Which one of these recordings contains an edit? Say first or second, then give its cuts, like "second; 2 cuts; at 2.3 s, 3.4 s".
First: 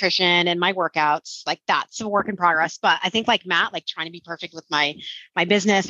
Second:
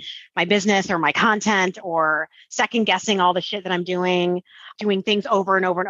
second; 1 cut; at 4.7 s